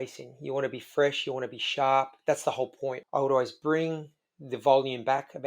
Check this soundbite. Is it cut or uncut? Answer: cut